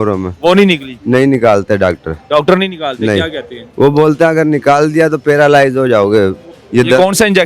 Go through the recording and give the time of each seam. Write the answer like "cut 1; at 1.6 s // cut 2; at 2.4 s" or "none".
cut 1; at 6.5 s